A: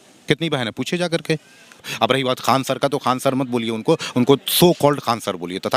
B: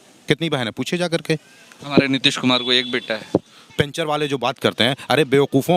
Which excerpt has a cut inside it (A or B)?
A